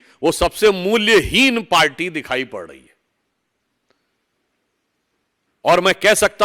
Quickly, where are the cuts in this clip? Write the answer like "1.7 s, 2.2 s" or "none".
none

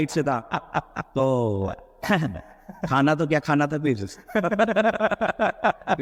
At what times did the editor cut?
none

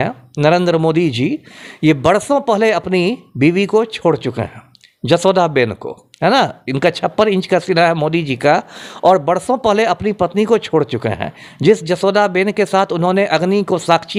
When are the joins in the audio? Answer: none

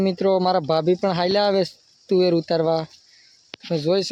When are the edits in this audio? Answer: none

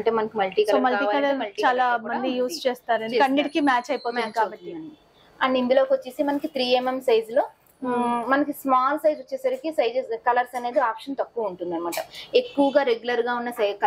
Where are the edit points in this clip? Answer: none

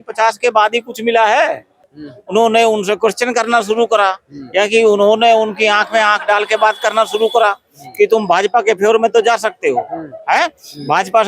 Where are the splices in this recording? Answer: 1.9 s

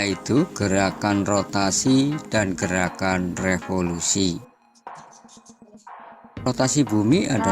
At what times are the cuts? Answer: 2.8 s, 5.9 s

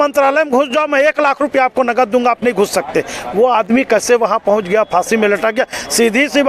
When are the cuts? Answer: none

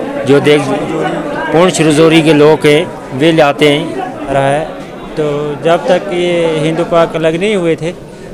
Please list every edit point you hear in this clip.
4.3 s

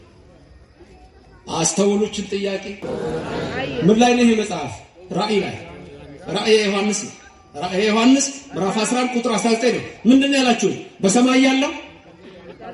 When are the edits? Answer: 2.8 s

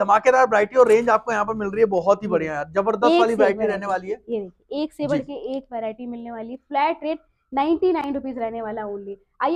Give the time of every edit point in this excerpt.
none

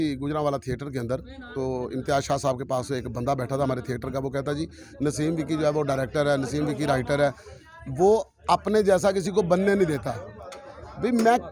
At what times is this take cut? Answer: none

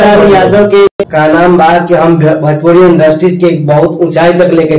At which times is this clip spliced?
1.0 s

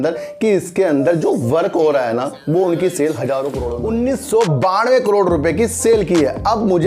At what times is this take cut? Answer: 3.7 s

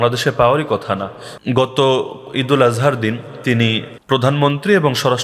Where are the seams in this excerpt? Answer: 1.3 s, 3.9 s

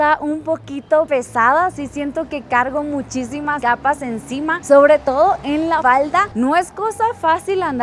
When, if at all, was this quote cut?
1.1 s, 3.6 s, 5.8 s

